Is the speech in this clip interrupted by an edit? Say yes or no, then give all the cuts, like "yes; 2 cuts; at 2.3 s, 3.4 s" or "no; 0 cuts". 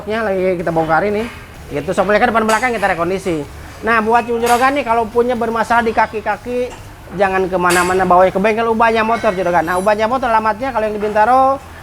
no; 0 cuts